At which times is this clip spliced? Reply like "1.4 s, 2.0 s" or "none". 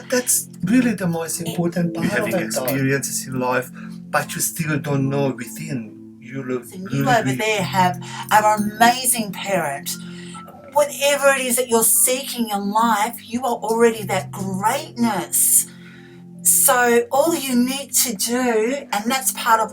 2.7 s, 7.1 s